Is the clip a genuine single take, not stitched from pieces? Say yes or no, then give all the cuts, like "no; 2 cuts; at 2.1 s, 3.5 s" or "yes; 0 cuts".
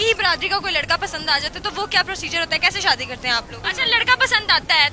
no; 1 cut; at 3.6 s